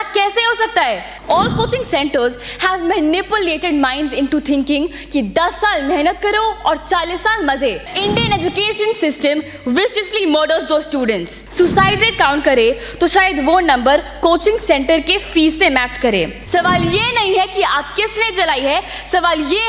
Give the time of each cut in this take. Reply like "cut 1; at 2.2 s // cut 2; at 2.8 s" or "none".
cut 1; at 1.1 s // cut 2; at 7.9 s // cut 3; at 11.4 s // cut 4; at 16.4 s